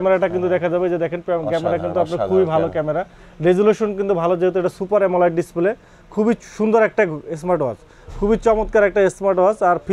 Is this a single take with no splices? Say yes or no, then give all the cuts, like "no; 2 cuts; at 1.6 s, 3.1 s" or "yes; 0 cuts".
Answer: yes; 0 cuts